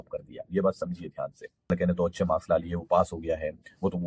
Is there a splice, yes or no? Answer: yes